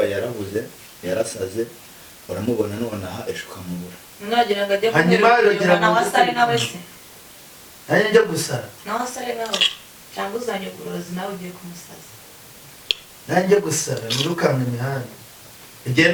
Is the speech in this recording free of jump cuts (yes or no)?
yes